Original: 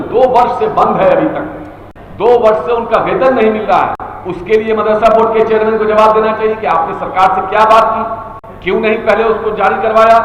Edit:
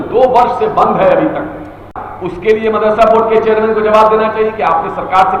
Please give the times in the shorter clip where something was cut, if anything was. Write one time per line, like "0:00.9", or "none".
0:02.0